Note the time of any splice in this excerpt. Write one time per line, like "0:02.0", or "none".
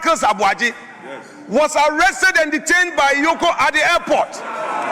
none